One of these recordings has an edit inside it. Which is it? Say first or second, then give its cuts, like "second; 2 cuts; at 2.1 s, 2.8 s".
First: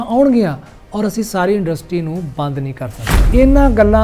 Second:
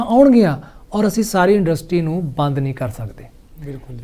first; 1 cut; at 3.1 s